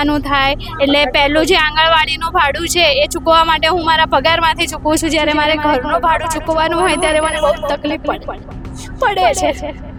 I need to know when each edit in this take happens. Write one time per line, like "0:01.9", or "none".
none